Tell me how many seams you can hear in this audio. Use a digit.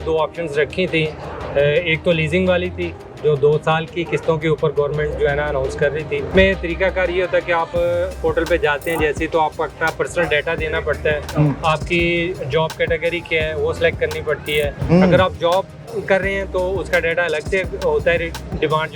2